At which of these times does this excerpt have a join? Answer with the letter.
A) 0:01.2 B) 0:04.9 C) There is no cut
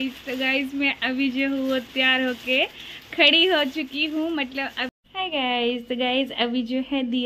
B